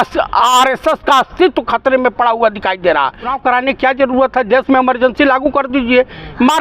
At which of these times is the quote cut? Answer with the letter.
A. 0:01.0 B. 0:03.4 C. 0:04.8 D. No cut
B